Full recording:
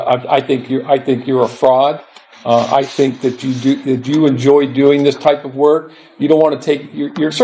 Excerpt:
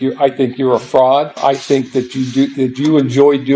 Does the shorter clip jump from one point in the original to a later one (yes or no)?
yes